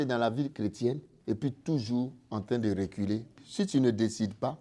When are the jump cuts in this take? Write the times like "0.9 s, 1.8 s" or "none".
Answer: 1.1 s, 3.4 s